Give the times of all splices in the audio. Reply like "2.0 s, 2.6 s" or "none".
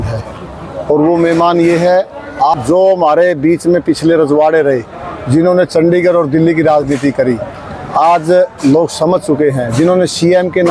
2.5 s